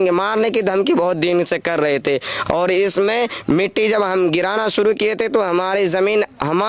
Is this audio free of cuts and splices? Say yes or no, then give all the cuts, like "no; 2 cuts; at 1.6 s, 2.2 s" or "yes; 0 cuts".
yes; 0 cuts